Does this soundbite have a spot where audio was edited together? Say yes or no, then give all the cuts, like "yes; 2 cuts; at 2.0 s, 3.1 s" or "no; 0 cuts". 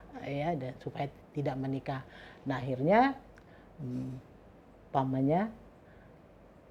no; 0 cuts